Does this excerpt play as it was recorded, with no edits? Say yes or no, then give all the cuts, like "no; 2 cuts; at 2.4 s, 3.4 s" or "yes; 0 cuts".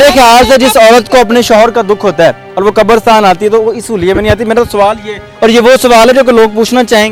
yes; 0 cuts